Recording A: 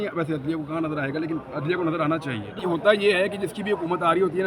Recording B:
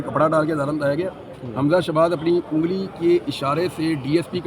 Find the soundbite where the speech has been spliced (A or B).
A